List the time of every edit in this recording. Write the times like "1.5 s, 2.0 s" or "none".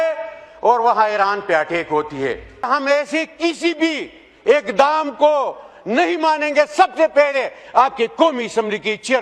2.7 s